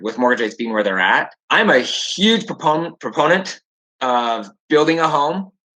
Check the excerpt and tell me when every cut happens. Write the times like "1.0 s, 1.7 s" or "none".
1.4 s